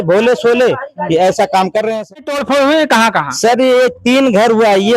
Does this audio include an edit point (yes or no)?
yes